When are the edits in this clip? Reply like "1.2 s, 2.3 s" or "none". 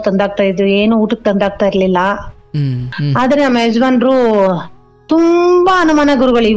3.0 s